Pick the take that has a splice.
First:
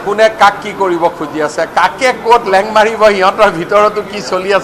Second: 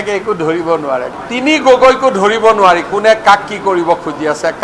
second; 1 cut; at 1.1 s

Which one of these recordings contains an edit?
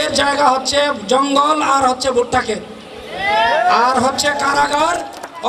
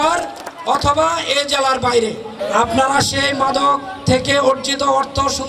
second; 1 cut; at 2.3 s

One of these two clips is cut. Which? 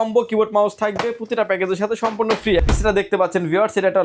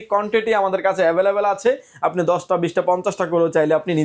first; 1 cut; at 2.6 s

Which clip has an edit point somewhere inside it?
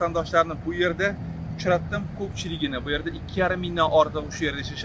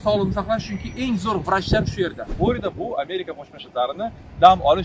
second; 1 cut; at 2.3 s

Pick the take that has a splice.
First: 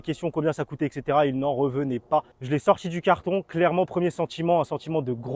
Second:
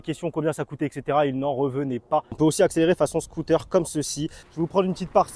second; 2 cuts; at 2.4 s, 4.4 s

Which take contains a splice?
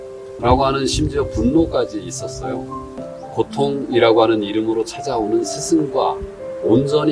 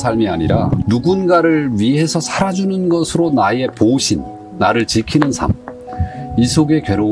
first; 1 cut; at 3.1 s

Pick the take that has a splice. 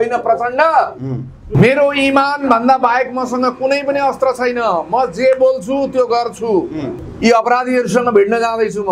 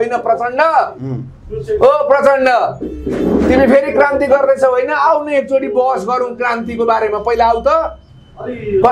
first; 2 cuts; at 1.4 s, 7.0 s

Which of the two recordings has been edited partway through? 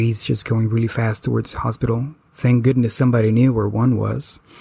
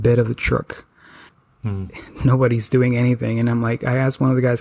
second; 1 cut; at 1.7 s

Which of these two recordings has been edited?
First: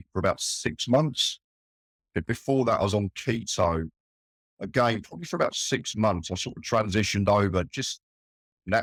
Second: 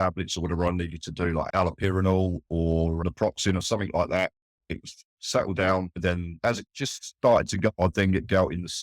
second; 4 cuts; at 1.5 s, 3.0 s, 6.4 s, 7.8 s

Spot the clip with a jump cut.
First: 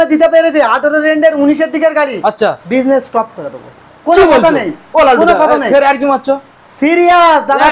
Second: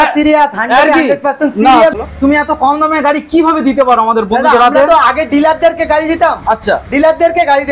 second; 1 cut; at 1.9 s

